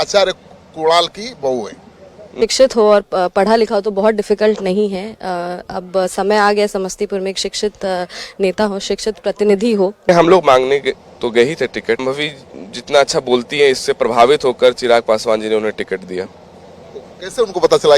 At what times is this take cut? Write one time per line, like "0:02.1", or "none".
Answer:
0:02.4
0:10.1
0:12.0

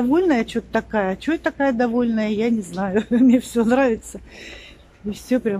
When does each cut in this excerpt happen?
none

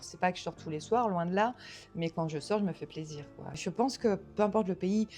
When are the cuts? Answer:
0:03.6

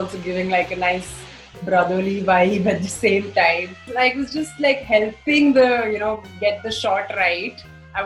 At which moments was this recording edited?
0:03.9

